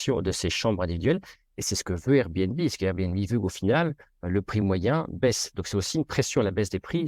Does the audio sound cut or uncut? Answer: uncut